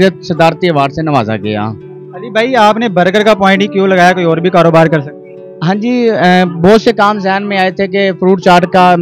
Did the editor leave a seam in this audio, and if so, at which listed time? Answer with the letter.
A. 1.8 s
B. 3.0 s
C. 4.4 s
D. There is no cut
D